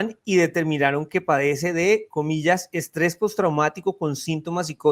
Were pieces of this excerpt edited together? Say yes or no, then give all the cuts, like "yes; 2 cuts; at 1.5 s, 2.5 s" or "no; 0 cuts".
no; 0 cuts